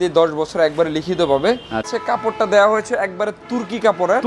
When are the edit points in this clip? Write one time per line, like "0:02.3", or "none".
0:01.9